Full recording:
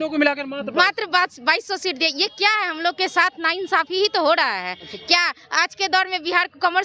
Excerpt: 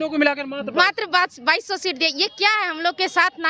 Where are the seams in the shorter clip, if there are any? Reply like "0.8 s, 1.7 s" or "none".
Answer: none

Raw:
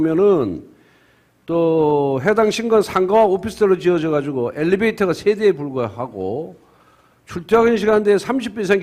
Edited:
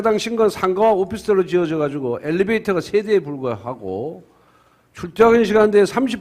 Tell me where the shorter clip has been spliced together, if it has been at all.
none

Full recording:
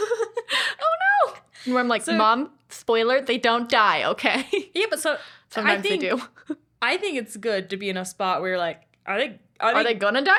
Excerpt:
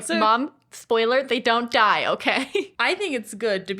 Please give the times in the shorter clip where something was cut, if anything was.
2.7 s

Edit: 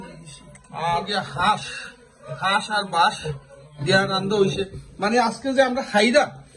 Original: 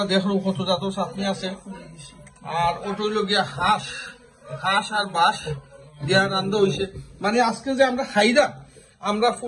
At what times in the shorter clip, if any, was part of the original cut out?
1.1 s

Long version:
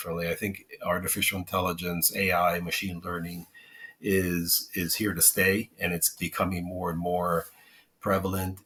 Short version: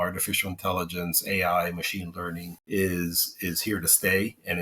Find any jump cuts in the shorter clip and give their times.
2.5 s

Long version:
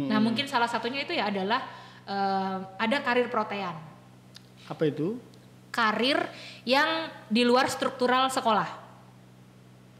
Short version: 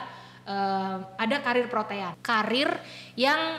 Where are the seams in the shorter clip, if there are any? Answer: 2.1 s

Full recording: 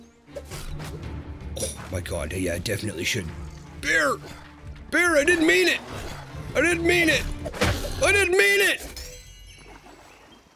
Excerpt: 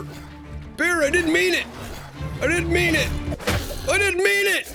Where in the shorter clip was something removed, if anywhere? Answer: none

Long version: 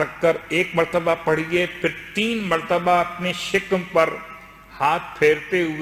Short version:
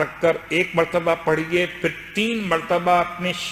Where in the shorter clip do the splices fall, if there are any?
none

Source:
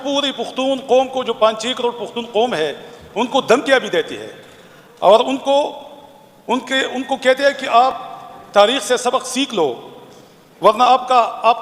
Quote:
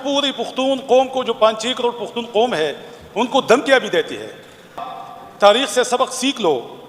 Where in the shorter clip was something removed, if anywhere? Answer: 4.9 s

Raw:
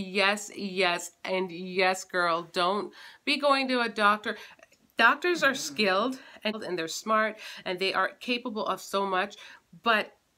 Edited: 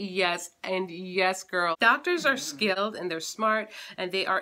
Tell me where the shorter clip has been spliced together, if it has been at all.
1.8 s, 2.8 s

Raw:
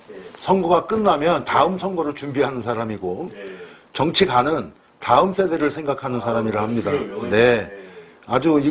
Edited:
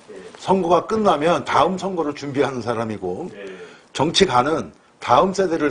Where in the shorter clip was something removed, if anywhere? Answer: none

